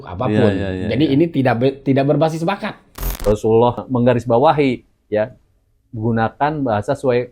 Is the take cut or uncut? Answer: cut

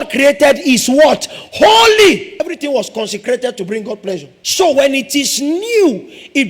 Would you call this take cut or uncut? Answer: cut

